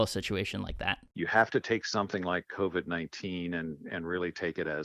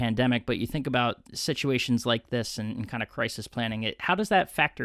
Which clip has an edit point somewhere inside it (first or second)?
first